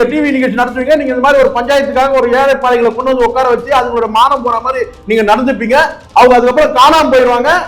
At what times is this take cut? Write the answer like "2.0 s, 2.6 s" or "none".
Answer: none